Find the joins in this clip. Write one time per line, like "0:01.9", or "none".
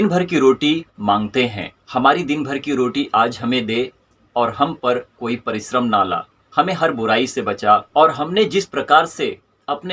0:00.9
0:07.9